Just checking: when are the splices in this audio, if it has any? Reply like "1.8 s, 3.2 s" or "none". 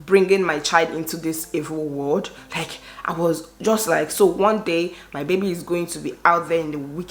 none